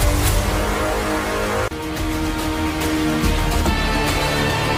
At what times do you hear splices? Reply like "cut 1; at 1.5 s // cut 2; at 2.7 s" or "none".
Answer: none